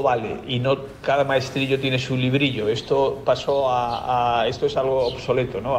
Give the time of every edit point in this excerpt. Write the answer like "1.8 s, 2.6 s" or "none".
1.0 s